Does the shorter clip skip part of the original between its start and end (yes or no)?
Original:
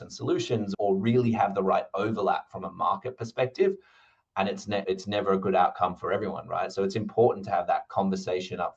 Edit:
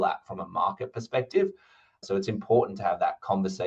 yes